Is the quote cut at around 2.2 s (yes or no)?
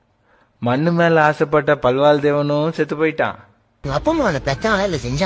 no